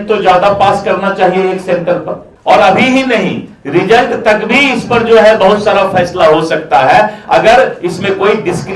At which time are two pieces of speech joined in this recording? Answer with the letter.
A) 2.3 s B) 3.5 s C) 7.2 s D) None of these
A